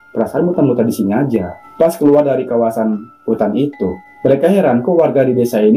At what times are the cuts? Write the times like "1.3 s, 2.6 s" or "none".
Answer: 1.6 s